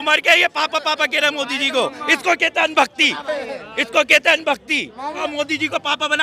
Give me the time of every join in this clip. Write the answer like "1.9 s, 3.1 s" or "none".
5.2 s